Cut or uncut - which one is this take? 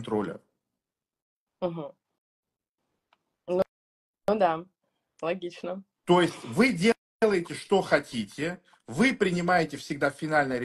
uncut